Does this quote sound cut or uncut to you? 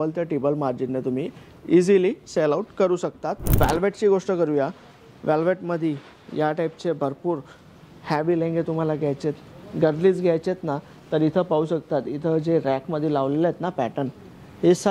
cut